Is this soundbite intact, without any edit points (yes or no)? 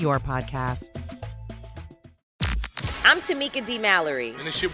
no